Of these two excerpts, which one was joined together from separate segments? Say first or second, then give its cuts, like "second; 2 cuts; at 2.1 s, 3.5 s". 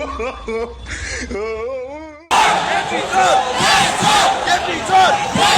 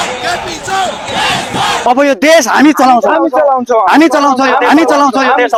first; 1 cut; at 2.3 s